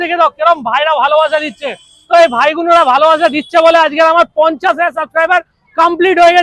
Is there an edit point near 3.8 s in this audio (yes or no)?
no